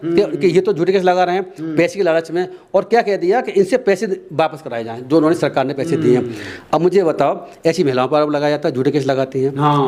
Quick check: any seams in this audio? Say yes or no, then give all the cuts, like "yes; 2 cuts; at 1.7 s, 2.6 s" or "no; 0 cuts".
no; 0 cuts